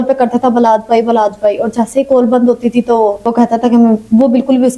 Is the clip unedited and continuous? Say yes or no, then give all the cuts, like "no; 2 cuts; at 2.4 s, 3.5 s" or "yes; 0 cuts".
yes; 0 cuts